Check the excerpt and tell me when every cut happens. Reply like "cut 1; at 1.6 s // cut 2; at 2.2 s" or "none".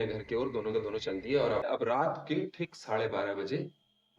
cut 1; at 1.7 s